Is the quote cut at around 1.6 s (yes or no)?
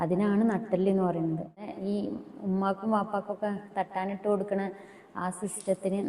yes